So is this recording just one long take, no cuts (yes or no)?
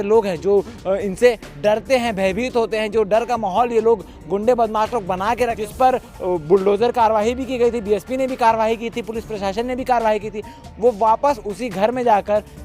no